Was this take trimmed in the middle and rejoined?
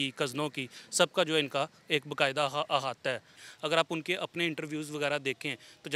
yes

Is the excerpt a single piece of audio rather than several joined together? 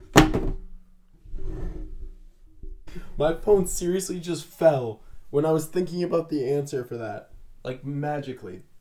yes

